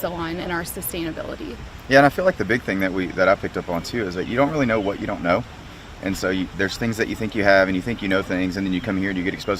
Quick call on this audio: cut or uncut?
cut